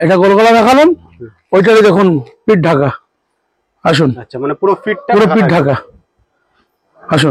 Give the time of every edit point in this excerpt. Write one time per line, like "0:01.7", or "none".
none